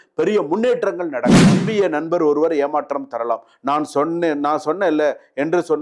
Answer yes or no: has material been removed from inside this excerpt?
yes